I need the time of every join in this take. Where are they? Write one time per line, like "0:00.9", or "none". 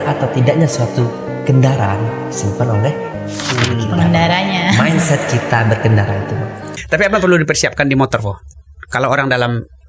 0:06.7